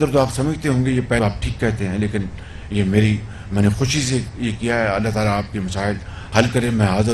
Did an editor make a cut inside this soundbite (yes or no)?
yes